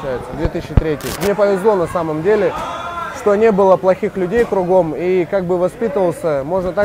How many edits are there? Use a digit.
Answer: 1